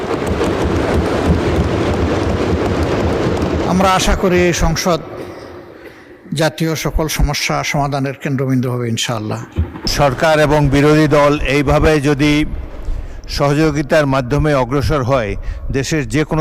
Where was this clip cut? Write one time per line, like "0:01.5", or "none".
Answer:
0:09.9